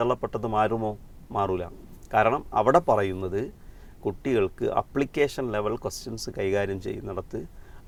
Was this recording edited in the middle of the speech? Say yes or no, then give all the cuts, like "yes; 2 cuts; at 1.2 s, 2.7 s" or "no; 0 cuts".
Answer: no; 0 cuts